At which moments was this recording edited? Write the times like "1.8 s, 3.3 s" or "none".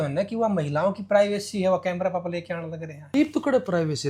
3.1 s